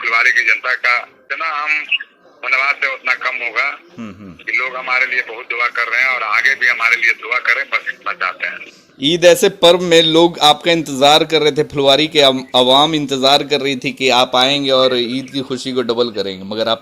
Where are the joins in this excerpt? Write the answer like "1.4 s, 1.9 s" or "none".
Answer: 1.2 s